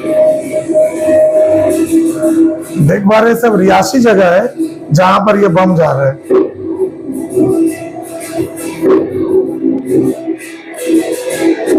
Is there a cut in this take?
no; 0 cuts

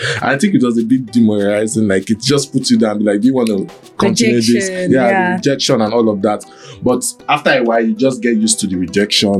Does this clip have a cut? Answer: no; 0 cuts

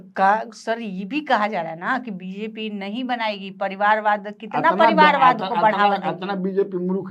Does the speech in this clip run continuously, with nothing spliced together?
yes; 0 cuts

